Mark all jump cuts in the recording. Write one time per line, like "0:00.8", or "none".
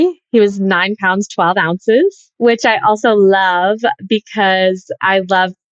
0:02.3